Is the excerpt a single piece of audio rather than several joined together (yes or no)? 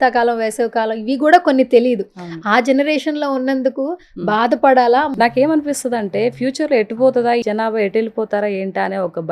no